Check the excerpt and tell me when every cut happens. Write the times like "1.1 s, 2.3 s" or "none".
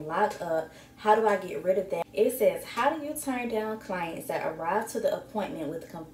2.0 s